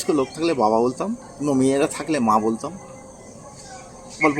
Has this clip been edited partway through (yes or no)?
yes